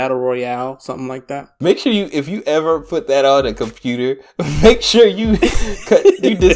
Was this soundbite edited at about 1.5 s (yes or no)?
yes